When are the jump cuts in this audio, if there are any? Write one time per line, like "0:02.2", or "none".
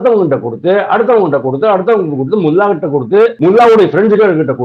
0:03.4